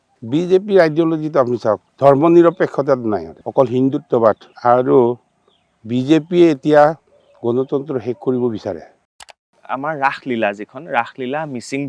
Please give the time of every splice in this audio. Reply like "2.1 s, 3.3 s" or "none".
1.9 s, 3.4 s, 4.5 s, 9.6 s